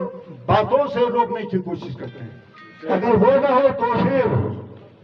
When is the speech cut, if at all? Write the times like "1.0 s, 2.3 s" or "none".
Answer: 2.9 s